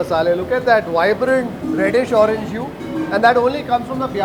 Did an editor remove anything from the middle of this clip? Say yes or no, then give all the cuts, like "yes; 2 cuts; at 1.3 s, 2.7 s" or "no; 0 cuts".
no; 0 cuts